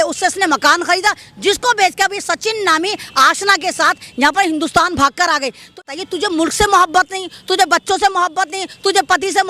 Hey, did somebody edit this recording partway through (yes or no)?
yes